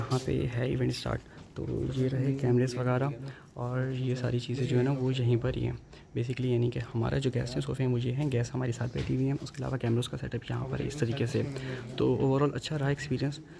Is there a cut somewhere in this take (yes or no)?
no